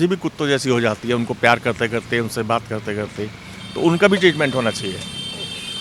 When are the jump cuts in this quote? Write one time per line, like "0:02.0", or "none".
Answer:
none